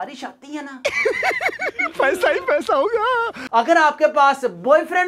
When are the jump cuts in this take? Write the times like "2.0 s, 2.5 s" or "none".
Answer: 0.8 s, 3.4 s